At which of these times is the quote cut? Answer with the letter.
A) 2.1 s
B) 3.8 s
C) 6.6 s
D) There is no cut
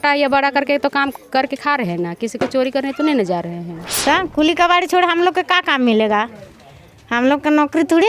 B